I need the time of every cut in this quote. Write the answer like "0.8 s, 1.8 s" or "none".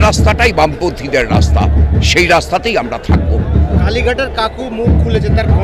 none